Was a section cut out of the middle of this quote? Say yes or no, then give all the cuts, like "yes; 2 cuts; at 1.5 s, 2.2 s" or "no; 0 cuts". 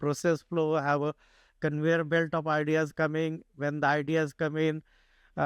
no; 0 cuts